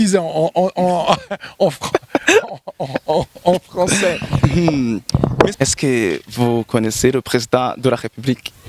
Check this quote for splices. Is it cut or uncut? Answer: cut